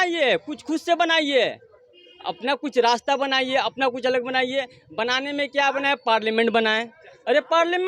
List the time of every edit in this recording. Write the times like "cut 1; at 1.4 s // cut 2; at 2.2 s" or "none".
none